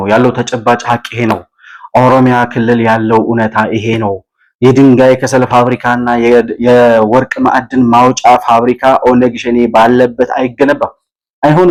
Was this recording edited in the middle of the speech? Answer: no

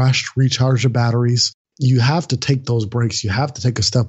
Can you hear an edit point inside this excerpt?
yes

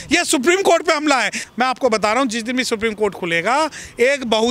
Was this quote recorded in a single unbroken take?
no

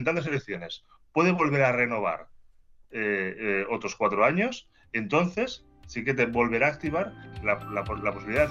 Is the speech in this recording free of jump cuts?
yes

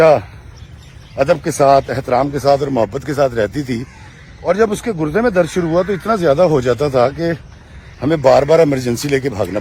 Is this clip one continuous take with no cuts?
yes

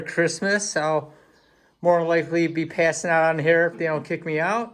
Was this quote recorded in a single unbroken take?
yes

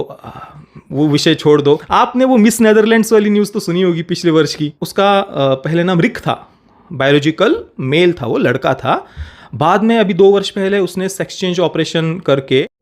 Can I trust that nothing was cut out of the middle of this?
no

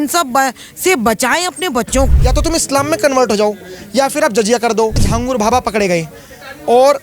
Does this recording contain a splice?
yes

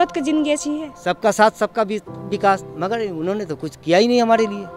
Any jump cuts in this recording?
yes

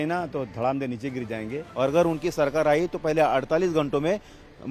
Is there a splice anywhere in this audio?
yes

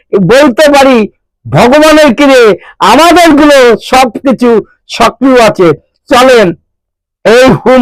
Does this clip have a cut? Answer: no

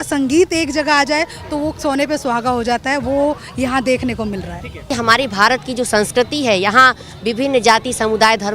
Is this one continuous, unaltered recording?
no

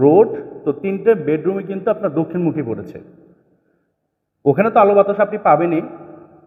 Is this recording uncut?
yes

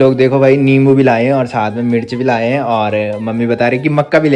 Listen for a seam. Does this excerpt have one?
no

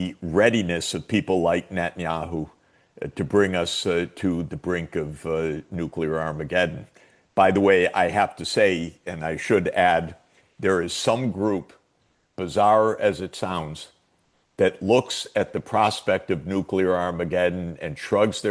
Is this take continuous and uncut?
yes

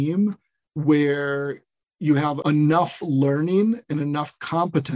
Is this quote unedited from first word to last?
yes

